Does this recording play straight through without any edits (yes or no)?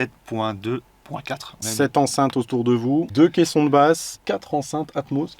no